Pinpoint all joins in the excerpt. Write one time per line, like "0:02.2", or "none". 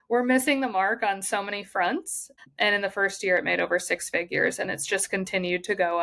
0:02.3